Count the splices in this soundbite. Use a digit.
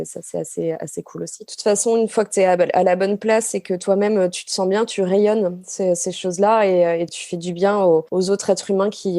3